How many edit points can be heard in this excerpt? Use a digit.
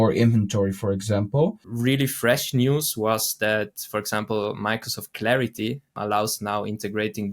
2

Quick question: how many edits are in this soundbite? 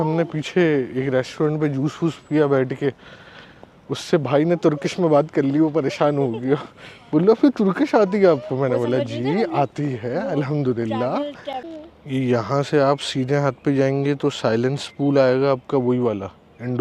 1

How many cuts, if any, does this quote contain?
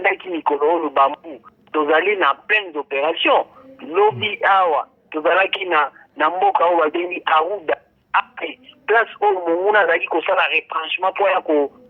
0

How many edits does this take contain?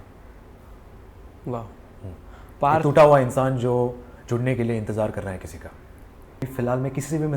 1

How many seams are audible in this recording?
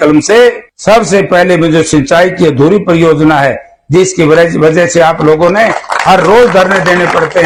0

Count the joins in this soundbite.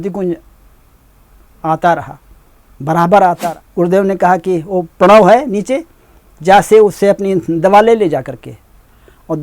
1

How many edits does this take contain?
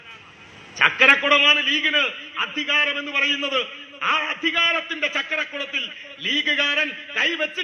0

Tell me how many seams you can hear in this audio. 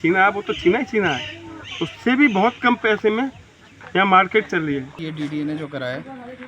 1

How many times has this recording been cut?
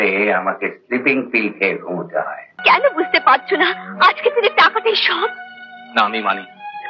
1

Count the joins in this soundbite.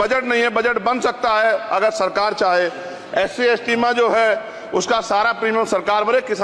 1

